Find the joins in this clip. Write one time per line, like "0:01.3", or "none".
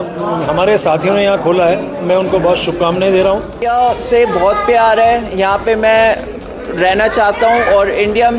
0:03.6